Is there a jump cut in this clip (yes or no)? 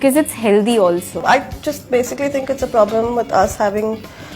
yes